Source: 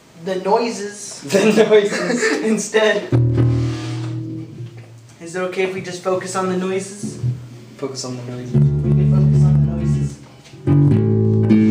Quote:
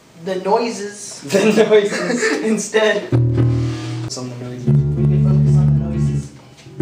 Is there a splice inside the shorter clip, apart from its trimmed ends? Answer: yes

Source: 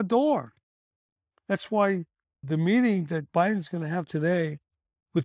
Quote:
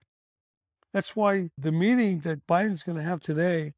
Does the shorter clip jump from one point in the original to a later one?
yes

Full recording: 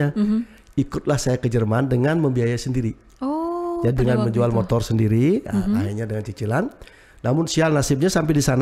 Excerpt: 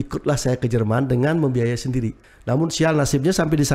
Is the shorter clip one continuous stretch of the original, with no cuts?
no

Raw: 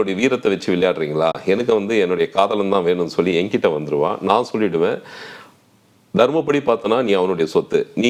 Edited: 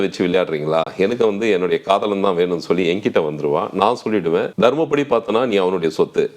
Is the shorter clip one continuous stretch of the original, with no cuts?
no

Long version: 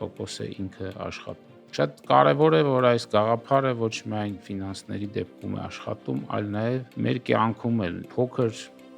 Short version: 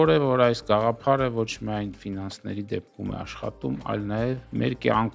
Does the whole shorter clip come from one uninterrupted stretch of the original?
yes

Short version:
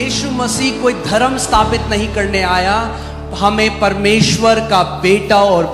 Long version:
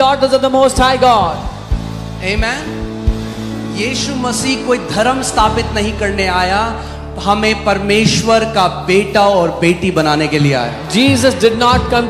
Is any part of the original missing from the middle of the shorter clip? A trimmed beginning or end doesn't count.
no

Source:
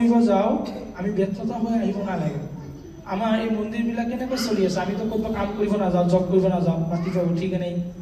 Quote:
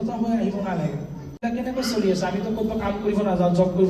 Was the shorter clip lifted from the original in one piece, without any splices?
no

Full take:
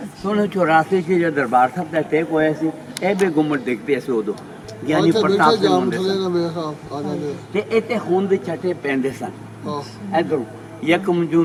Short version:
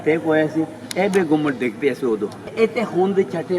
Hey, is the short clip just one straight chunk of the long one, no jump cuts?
no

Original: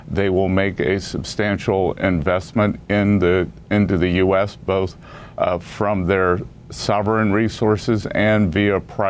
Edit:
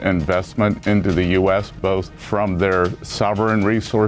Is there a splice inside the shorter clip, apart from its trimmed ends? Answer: yes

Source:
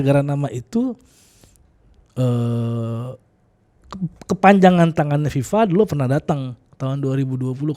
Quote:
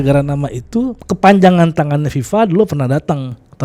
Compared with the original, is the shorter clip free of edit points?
no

